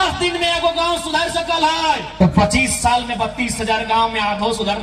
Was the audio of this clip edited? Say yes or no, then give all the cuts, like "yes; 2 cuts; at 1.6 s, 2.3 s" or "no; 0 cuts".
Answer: yes; 1 cut; at 2.1 s